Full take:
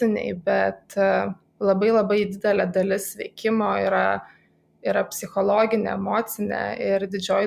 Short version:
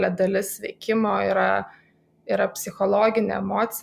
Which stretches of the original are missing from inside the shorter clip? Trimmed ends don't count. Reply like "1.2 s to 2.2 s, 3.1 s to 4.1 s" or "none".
none